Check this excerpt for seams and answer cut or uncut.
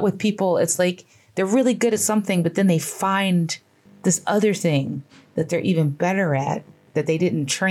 uncut